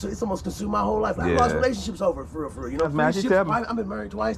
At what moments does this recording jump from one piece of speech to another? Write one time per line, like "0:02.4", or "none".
0:02.9